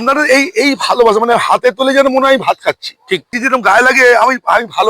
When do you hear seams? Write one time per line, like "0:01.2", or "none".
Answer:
0:03.4